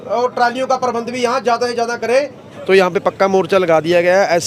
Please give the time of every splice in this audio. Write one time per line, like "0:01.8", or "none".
0:02.5